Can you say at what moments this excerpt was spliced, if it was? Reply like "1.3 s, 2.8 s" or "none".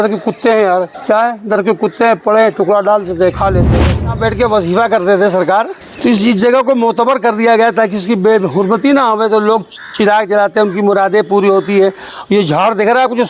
0.9 s, 3.7 s, 5.8 s